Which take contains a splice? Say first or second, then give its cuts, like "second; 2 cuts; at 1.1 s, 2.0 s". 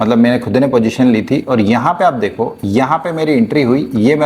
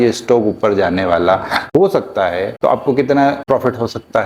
second; 3 cuts; at 1.6 s, 2.5 s, 3.4 s